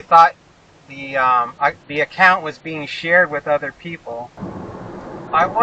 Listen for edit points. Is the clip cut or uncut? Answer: cut